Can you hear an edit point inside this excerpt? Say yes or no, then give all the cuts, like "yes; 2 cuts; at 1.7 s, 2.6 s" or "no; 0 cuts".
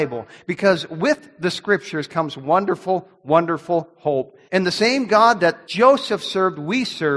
yes; 2 cuts; at 4.4 s, 5.6 s